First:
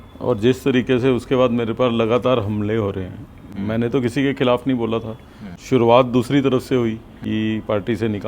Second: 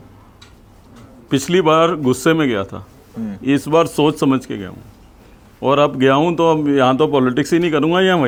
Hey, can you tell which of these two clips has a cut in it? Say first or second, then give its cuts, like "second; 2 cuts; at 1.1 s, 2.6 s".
first; 2 cuts; at 5.5 s, 7.2 s